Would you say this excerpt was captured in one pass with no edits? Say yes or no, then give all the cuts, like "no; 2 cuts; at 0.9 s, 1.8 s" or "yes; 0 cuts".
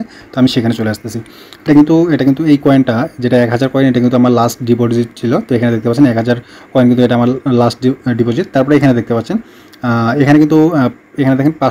no; 1 cut; at 1.5 s